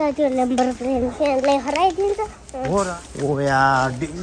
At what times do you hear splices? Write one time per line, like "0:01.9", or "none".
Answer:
0:02.9